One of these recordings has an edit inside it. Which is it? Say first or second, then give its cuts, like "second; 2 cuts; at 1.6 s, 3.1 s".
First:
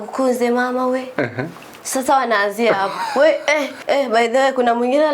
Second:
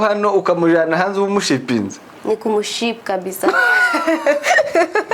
first; 1 cut; at 3.7 s